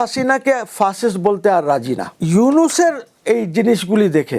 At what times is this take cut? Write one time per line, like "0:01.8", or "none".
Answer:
0:02.1